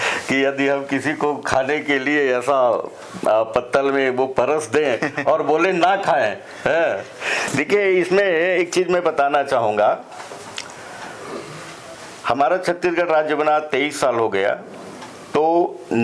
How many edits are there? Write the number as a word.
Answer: zero